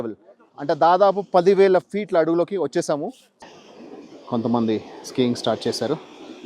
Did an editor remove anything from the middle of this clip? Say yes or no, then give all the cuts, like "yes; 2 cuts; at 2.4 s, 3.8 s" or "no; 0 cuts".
yes; 1 cut; at 3.2 s